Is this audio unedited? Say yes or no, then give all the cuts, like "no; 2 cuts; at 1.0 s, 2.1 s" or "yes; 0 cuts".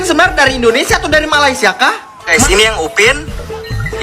no; 1 cut; at 2.4 s